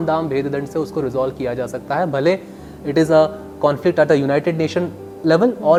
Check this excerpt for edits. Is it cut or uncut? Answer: uncut